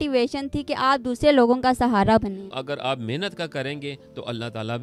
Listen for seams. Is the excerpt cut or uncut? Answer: cut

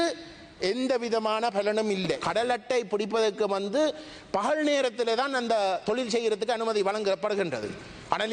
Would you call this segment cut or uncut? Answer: cut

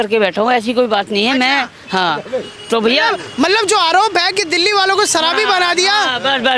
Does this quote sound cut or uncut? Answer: uncut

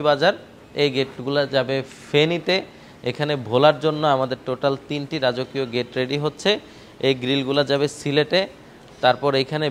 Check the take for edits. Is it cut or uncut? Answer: uncut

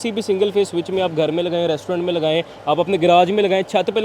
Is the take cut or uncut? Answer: uncut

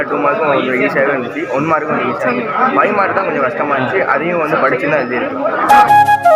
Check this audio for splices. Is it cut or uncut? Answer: uncut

